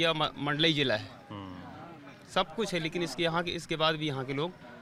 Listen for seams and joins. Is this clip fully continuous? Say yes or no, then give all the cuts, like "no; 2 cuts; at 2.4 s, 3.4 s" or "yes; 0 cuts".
yes; 0 cuts